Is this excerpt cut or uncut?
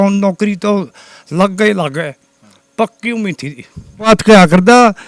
cut